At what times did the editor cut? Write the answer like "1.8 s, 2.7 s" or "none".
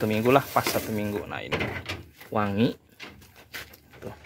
1.5 s